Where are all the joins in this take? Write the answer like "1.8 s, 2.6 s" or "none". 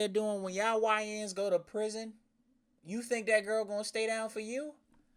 none